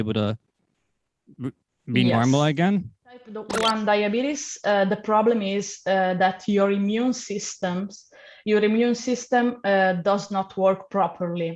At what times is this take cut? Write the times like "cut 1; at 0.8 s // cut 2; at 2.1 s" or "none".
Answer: cut 1; at 3.4 s